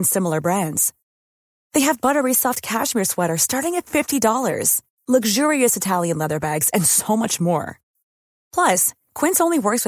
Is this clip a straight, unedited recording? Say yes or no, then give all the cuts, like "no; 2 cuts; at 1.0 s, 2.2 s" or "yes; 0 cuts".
yes; 0 cuts